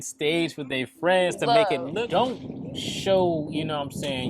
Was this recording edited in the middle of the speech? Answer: yes; 1 cut; at 1.9 s

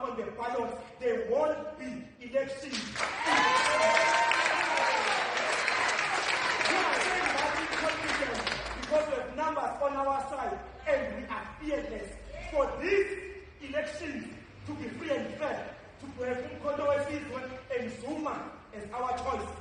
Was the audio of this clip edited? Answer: no; 0 cuts

